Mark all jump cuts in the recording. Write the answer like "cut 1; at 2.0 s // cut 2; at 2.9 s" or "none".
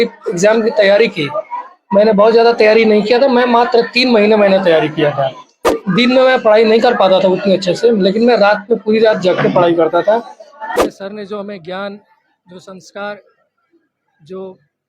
cut 1; at 5.8 s // cut 2; at 10.7 s